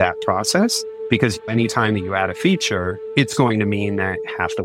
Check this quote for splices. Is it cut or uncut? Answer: cut